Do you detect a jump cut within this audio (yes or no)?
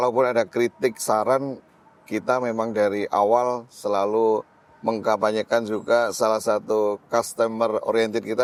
no